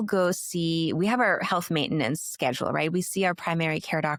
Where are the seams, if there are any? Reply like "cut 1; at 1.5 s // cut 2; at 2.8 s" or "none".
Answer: none

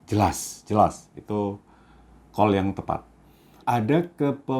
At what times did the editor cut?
cut 1; at 3.6 s

